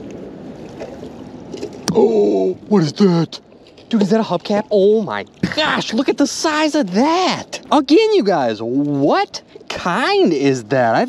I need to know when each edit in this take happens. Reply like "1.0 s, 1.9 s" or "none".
none